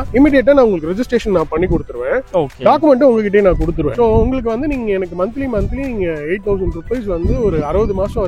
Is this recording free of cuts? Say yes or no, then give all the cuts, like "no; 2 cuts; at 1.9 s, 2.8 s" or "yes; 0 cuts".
no; 1 cut; at 3.9 s